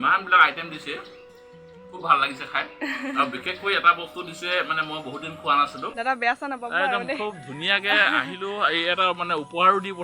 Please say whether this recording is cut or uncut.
cut